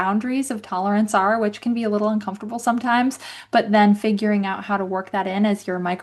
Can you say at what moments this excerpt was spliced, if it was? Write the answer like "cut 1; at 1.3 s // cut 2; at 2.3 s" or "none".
none